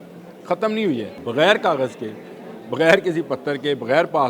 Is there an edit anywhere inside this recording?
yes; 1 cut; at 1.1 s

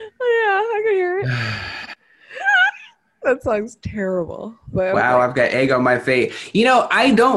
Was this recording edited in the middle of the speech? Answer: yes; 1 cut; at 5.0 s

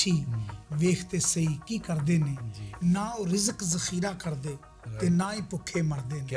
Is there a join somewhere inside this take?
no; 0 cuts

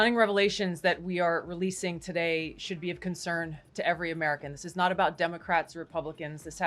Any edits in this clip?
no; 0 cuts

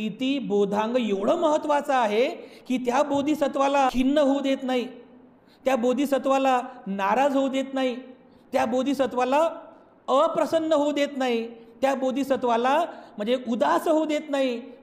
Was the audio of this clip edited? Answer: yes; 1 cut; at 3.9 s

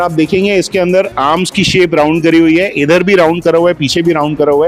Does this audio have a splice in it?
no; 0 cuts

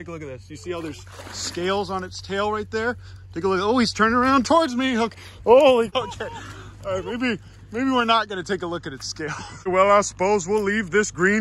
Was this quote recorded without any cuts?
yes; 0 cuts

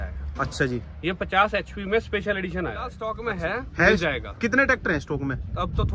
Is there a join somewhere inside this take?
yes; 1 cut; at 3.1 s

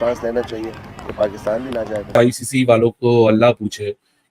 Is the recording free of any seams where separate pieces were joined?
yes; 0 cuts

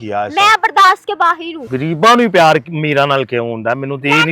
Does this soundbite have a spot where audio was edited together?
yes; 1 cut; at 1.6 s

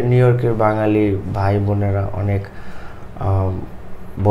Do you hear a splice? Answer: no; 0 cuts

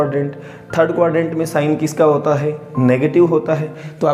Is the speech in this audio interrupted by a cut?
no; 0 cuts

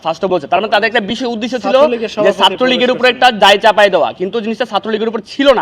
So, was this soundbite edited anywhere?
no; 0 cuts

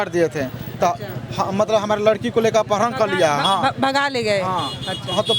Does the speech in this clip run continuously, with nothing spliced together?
yes; 0 cuts

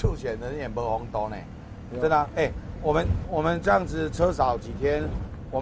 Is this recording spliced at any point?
no; 0 cuts

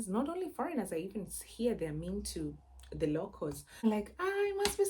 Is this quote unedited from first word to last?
no; 1 cut; at 3.8 s

